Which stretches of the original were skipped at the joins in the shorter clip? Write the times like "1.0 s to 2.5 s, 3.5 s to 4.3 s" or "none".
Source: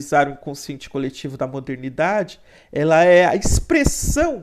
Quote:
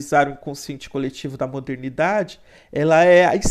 none